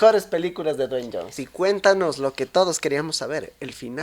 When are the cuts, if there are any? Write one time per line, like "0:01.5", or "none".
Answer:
0:01.4